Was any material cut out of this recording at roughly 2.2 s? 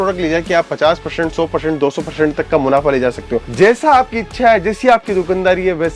no; 1 cut; at 3.4 s

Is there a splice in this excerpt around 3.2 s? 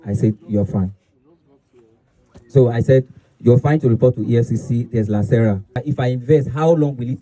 no; 1 cut; at 5.7 s

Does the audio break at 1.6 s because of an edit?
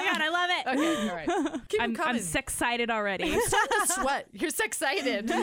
yes; 1 cut; at 1.6 s

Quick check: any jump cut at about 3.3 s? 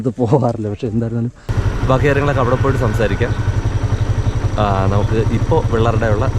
no; 1 cut; at 1.5 s

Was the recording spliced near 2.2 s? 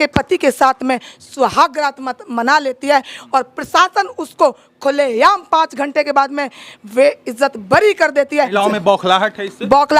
no; 1 cut; at 8.5 s

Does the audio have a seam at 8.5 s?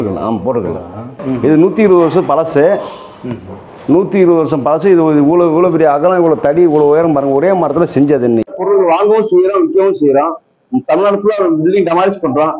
yes; 2 cuts; at 1.2 s, 8.5 s

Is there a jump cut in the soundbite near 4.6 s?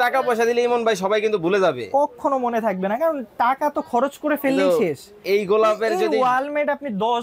no; 0 cuts

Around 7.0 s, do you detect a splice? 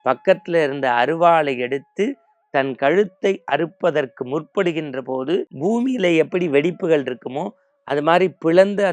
no; 1 cut; at 5.5 s

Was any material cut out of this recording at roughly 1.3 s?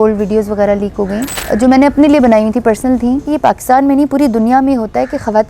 yes; 2 cuts; at 1.3 s, 3.3 s

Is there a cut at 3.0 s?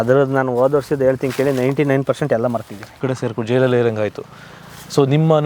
yes; 1 cut; at 3.0 s

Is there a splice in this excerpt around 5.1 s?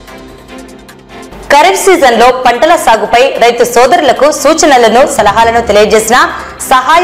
no; 1 cut; at 1.1 s

